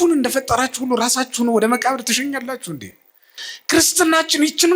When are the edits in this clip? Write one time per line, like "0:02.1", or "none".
0:03.4